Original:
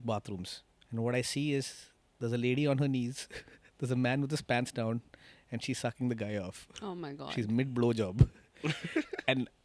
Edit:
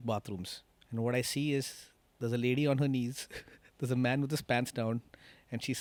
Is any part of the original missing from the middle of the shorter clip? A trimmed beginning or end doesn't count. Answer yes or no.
no